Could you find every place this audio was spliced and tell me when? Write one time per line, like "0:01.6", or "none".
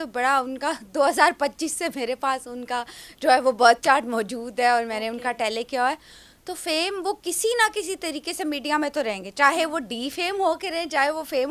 none